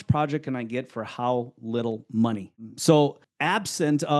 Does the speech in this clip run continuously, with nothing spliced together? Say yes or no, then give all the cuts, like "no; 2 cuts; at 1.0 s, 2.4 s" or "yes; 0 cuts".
no; 2 cuts; at 2.5 s, 3.3 s